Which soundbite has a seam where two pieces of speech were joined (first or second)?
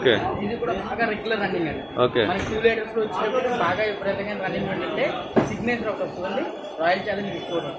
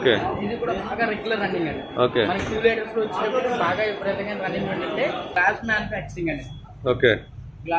second